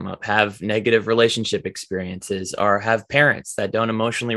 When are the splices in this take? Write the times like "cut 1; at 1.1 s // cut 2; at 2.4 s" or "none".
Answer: none